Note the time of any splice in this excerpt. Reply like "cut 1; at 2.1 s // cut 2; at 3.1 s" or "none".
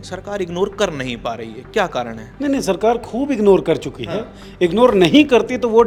none